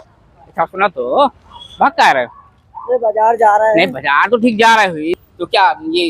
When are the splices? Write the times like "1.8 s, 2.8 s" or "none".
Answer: 5.2 s